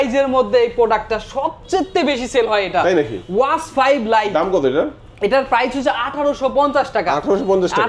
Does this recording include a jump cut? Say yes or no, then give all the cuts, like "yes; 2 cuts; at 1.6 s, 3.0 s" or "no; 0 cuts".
no; 0 cuts